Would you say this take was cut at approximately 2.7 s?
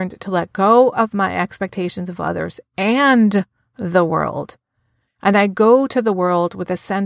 no; 0 cuts

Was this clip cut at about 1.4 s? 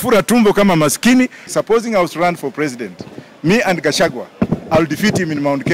yes; 1 cut; at 1.4 s

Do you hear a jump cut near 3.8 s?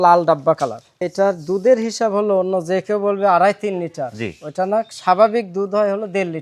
no; 1 cut; at 1.0 s

